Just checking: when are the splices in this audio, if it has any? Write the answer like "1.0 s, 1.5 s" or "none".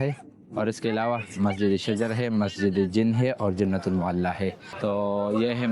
4.7 s